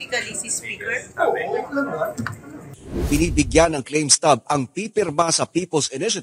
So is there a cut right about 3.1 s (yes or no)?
yes